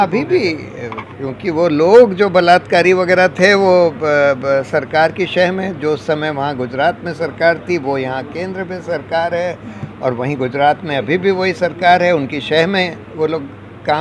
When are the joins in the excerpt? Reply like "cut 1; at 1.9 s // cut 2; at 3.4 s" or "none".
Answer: none